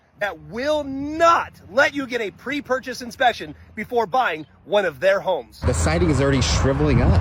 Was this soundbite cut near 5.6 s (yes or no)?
yes